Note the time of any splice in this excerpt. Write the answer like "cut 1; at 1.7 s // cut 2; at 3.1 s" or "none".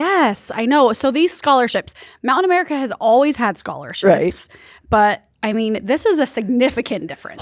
none